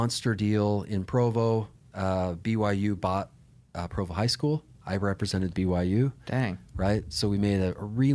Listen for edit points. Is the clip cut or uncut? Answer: uncut